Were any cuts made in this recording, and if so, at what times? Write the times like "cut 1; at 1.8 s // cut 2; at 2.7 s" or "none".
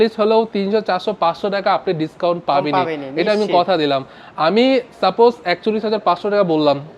none